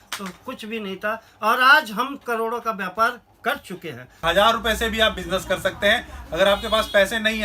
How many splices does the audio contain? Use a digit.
1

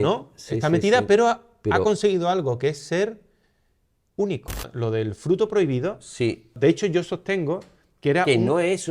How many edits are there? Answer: 2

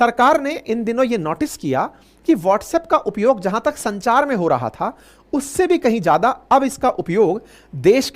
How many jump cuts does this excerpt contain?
0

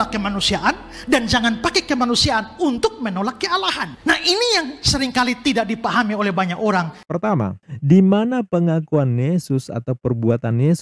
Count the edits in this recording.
1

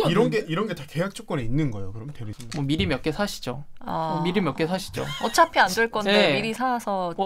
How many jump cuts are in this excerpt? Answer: 1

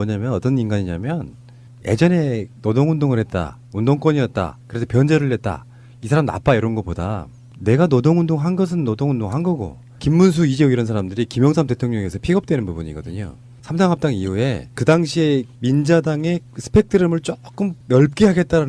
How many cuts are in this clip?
1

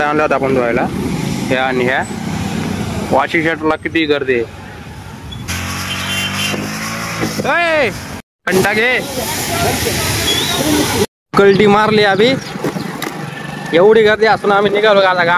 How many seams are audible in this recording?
0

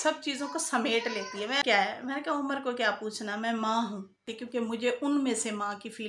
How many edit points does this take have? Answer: 2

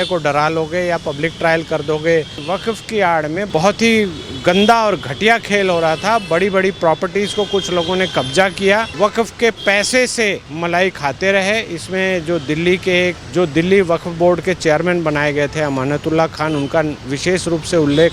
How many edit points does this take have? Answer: 5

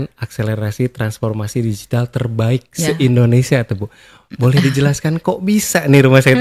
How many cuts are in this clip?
0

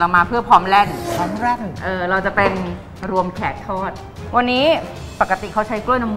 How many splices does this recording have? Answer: 2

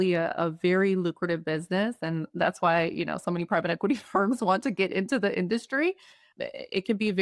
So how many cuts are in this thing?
0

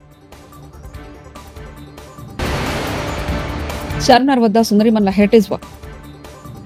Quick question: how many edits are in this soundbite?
0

